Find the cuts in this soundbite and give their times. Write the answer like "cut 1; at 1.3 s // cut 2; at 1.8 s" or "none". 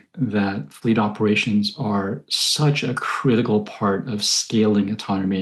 none